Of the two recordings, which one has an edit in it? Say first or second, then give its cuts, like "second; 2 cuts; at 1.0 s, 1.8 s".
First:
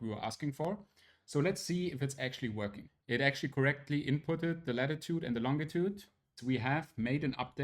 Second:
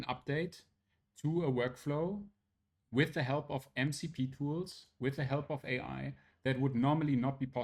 first; 2 cuts; at 2.9 s, 6.4 s